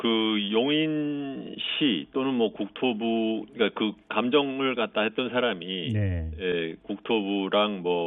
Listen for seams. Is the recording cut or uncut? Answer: uncut